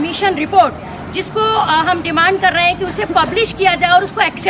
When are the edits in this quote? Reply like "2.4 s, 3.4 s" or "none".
none